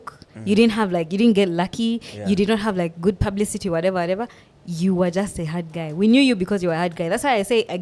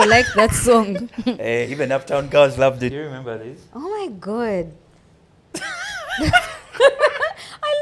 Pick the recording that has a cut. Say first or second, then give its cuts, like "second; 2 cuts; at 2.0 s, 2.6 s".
second; 1 cut; at 3.0 s